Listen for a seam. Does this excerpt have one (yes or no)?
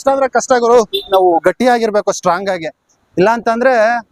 yes